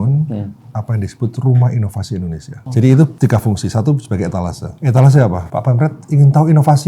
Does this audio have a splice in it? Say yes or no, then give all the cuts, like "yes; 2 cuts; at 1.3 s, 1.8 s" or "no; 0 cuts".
yes; 4 cuts; at 2.5 s, 3.1 s, 4.7 s, 5.4 s